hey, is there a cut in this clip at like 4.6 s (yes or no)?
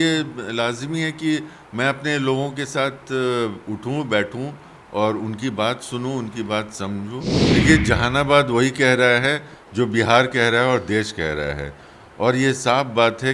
no